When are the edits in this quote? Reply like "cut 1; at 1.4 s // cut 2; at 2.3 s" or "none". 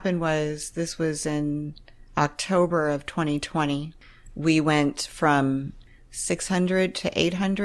cut 1; at 3.9 s // cut 2; at 5.8 s